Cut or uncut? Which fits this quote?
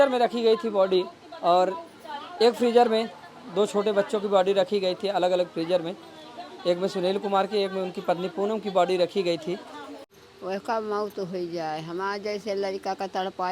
cut